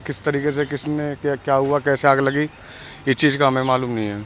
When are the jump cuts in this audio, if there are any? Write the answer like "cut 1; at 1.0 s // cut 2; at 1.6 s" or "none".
none